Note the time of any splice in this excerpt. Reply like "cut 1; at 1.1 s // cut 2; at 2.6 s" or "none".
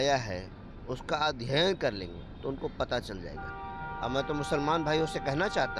none